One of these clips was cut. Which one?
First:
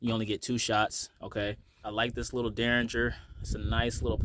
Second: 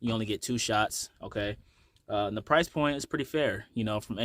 first; 1 cut; at 1.8 s

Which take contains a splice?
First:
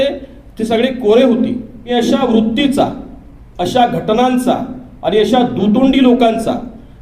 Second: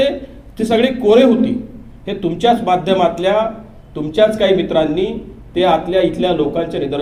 first; 1 cut; at 1.7 s

